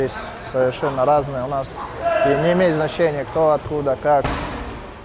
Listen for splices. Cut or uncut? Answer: uncut